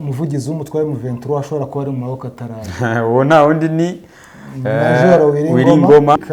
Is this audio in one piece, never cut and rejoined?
yes; 0 cuts

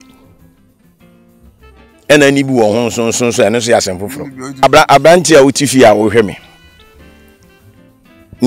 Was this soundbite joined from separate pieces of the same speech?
yes; 1 cut; at 4.6 s

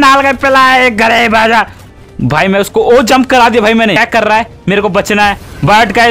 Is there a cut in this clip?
yes; 2 cuts; at 1.8 s, 4.0 s

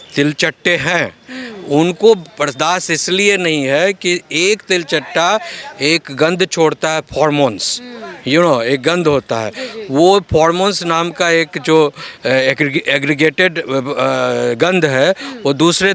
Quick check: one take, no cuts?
yes; 0 cuts

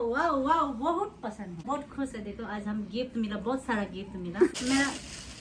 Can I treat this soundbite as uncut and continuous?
no; 2 cuts; at 1.6 s, 4.5 s

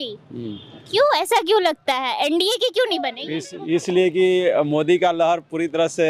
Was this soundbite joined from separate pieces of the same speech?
no; 0 cuts

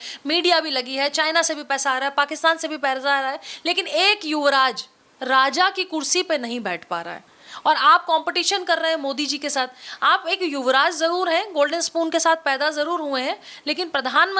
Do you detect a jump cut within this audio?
no; 0 cuts

